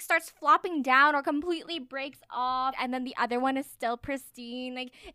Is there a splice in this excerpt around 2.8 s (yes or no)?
yes